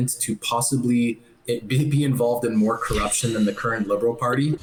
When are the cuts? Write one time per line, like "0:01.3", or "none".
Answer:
none